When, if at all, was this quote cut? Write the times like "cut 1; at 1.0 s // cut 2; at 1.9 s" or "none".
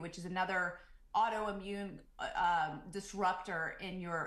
none